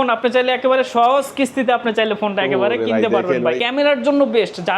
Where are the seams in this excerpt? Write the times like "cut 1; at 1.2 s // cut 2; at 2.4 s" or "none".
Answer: cut 1; at 3.6 s